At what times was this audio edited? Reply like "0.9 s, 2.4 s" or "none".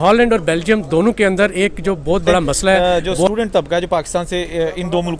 2.8 s